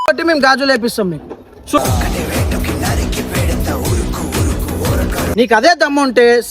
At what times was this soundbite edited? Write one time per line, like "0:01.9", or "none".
0:05.2